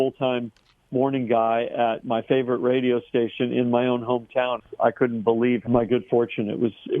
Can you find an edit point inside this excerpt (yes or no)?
yes